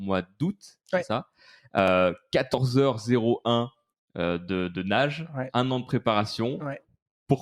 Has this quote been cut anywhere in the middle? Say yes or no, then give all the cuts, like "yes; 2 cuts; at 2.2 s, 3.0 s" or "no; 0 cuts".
no; 0 cuts